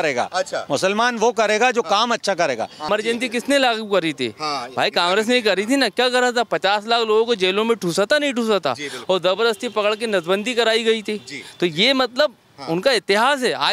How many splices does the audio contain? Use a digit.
1